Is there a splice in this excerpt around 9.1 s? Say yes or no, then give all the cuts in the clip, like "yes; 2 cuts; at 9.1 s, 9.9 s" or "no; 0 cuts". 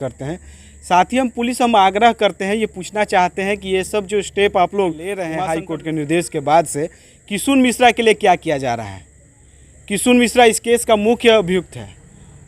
no; 1 cut; at 5.3 s